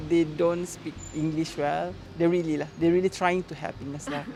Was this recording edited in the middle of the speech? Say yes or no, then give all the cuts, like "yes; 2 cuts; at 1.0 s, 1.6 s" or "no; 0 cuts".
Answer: no; 0 cuts